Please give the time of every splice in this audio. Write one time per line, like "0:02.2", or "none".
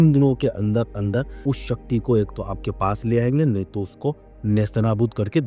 0:01.3